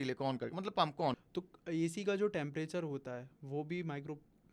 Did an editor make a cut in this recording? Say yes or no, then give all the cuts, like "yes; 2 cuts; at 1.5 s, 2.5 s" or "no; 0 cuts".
yes; 1 cut; at 1.2 s